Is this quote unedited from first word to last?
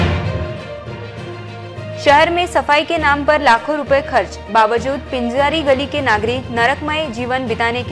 yes; 0 cuts

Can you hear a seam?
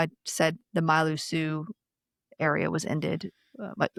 no; 0 cuts

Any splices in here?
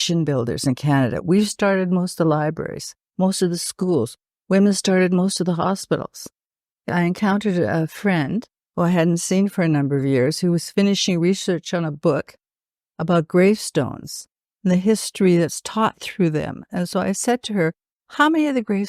yes; 1 cut; at 6.9 s

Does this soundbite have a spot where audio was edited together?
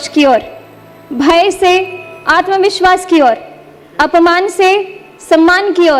no; 0 cuts

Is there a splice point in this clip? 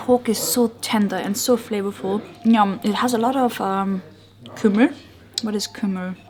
no; 0 cuts

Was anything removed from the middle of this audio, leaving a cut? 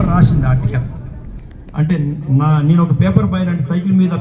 no; 0 cuts

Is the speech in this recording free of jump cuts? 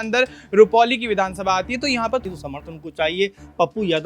no; 1 cut; at 2.2 s

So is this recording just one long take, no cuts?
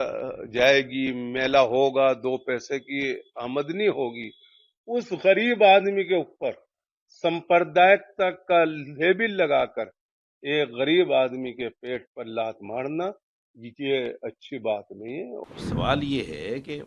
no; 1 cut; at 15.4 s

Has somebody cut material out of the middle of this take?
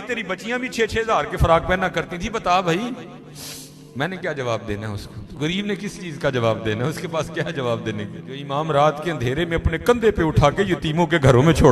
yes; 1 cut; at 8.4 s

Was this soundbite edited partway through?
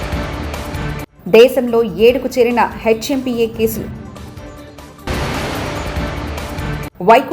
yes; 1 cut; at 1.1 s

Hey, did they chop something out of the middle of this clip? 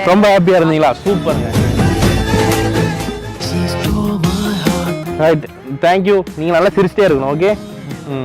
no; 0 cuts

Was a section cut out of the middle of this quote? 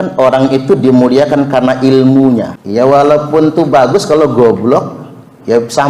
yes; 1 cut; at 2.5 s

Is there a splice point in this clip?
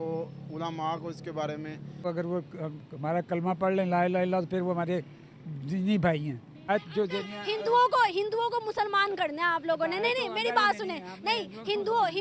yes; 1 cut; at 2.0 s

